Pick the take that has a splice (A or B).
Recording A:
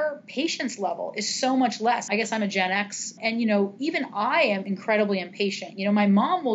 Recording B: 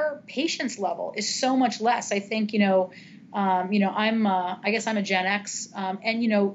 A